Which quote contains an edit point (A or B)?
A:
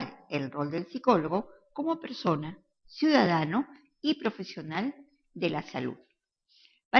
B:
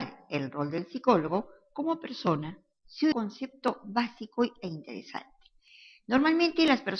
A